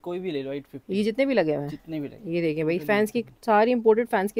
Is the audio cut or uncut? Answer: uncut